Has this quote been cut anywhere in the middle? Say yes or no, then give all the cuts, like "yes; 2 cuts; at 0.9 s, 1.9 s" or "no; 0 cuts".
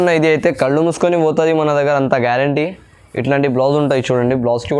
no; 0 cuts